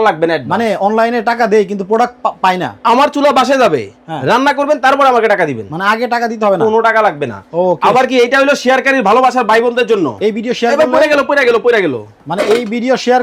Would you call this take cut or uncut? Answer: uncut